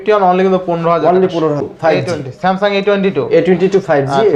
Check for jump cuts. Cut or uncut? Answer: cut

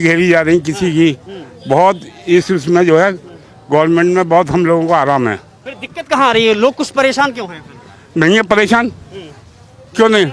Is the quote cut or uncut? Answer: uncut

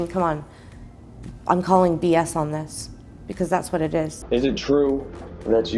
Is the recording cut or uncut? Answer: uncut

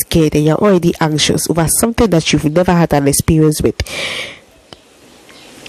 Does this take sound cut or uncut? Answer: uncut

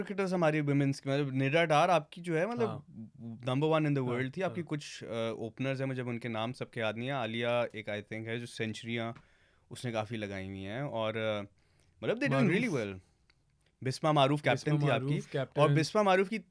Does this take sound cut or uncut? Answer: uncut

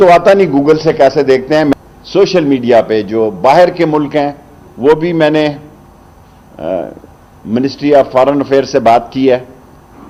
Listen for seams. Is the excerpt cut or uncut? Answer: cut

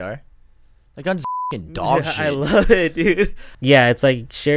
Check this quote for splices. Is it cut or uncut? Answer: cut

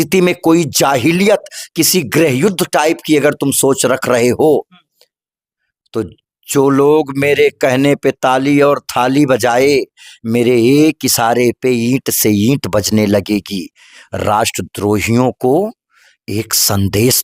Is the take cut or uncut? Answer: uncut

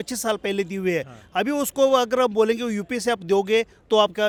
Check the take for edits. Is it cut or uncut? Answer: uncut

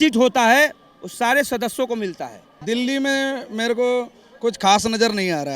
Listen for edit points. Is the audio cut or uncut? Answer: cut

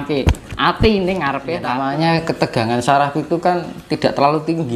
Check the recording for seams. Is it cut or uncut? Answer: cut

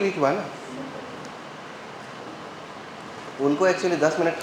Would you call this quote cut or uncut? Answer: cut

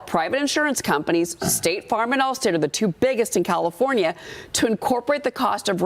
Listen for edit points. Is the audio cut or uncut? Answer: uncut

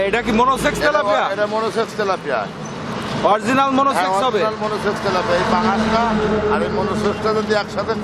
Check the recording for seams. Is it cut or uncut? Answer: uncut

